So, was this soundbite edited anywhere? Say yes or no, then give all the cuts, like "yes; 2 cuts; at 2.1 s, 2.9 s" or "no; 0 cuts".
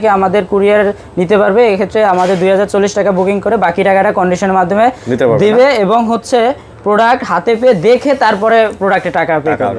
no; 0 cuts